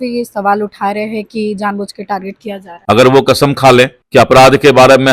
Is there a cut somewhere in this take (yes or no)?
yes